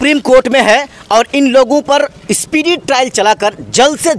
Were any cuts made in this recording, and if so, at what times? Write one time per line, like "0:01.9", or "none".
none

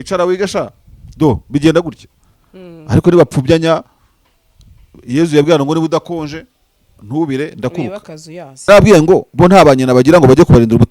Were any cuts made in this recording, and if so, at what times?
0:08.7

